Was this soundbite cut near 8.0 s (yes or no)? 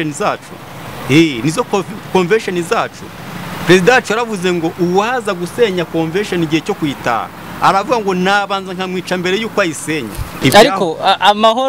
no